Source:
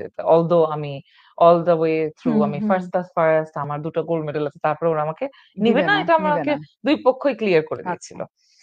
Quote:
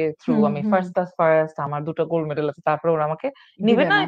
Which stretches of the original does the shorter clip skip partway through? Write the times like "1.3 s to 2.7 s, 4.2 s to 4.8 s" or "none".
none